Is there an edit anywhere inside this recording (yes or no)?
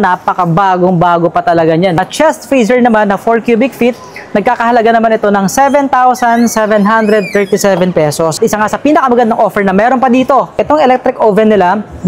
yes